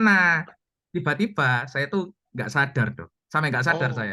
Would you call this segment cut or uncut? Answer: uncut